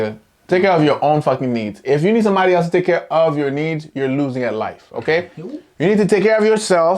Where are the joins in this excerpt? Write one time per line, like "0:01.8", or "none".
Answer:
none